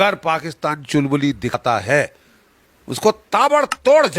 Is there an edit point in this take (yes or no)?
yes